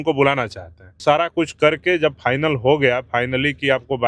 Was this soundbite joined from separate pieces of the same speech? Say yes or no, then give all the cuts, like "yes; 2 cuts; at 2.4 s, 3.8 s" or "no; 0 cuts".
yes; 1 cut; at 1.0 s